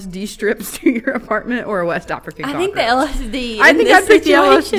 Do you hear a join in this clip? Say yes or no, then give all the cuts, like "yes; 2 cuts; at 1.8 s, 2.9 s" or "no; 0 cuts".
no; 0 cuts